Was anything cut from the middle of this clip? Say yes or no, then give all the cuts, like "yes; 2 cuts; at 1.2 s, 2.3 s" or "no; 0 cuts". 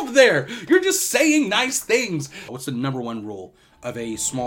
yes; 1 cut; at 2.4 s